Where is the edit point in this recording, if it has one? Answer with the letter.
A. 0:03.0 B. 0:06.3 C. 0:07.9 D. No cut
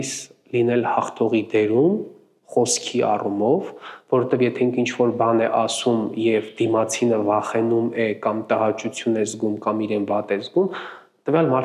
D